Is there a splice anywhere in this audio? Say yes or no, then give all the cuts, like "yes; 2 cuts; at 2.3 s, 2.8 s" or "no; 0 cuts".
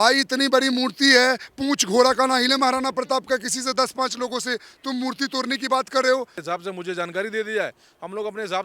yes; 1 cut; at 6.5 s